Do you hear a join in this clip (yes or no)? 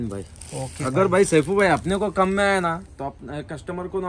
no